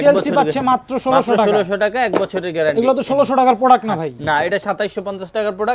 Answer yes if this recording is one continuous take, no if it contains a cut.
yes